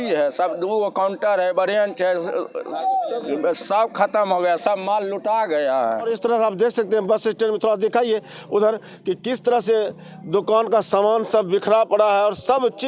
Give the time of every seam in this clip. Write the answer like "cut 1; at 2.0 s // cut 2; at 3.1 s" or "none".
cut 1; at 6.1 s